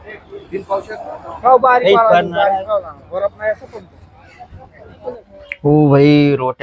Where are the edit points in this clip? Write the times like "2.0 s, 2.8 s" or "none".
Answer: 5.3 s